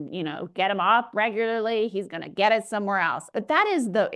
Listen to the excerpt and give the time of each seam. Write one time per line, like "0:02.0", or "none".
0:03.2